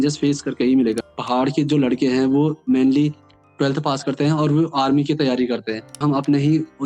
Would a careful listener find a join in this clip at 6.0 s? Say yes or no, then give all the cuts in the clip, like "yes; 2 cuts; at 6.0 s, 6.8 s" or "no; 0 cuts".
yes; 2 cuts; at 1.1 s, 6.0 s